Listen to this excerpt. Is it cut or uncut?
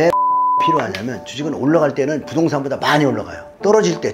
uncut